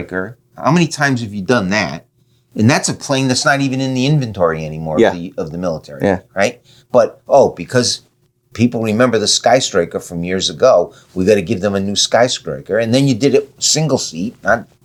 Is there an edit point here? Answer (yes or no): no